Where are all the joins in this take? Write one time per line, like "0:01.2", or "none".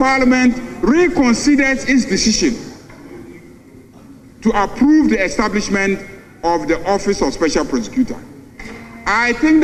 none